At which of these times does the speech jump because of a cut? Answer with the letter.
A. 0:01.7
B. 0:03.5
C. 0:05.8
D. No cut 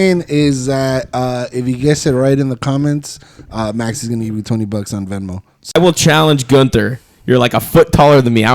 C